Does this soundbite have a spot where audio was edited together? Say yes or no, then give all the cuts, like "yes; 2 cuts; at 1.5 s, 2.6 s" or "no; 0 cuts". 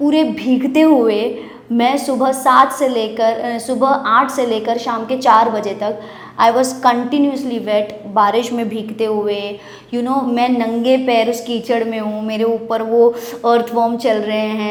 no; 0 cuts